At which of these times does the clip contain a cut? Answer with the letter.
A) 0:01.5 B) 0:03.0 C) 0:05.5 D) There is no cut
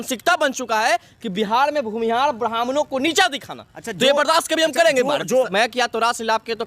C